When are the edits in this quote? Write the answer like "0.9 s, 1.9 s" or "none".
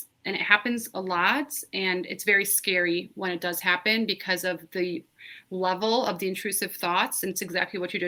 none